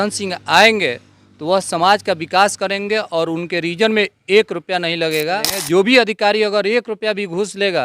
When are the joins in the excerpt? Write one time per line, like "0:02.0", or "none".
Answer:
0:05.5